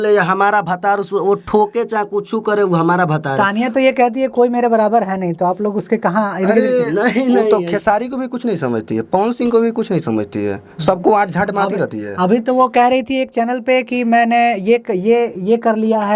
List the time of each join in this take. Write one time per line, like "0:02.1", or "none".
none